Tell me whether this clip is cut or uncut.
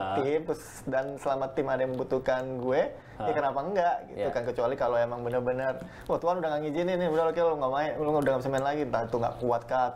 uncut